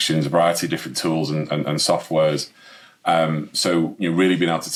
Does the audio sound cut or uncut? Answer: uncut